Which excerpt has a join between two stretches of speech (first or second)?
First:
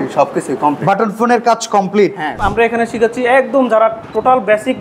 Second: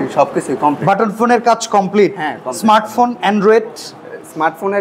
first